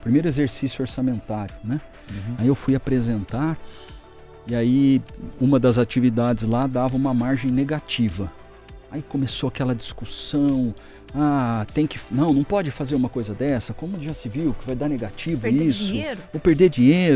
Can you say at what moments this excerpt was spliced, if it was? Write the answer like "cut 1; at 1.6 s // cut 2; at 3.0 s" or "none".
none

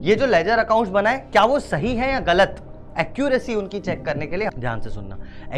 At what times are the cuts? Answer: cut 1; at 4.5 s

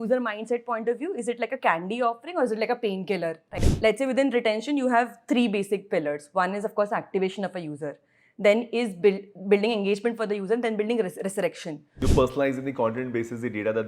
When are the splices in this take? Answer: cut 1; at 3.7 s // cut 2; at 11.9 s

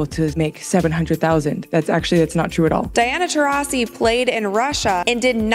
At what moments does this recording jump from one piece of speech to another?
cut 1; at 2.9 s

